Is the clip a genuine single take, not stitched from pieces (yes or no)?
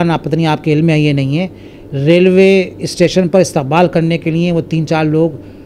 yes